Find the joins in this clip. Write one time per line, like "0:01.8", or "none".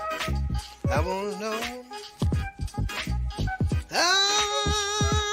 0:00.9